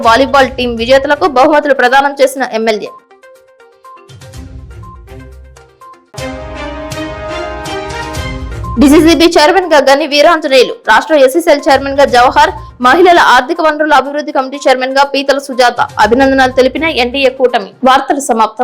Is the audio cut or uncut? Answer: uncut